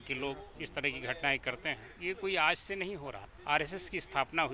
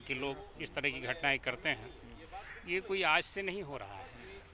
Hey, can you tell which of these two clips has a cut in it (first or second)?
first